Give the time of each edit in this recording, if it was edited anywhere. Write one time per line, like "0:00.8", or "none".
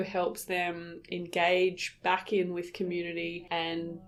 none